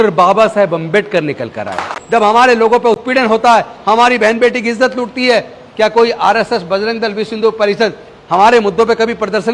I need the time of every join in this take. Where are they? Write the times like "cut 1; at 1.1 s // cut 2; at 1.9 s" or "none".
cut 1; at 1.9 s